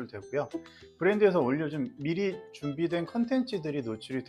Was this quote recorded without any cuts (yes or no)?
yes